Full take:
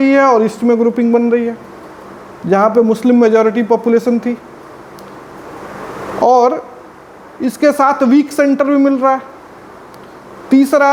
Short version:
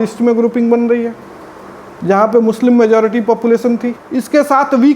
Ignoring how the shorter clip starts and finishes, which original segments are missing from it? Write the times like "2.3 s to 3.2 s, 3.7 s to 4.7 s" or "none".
4.4 s to 7.3 s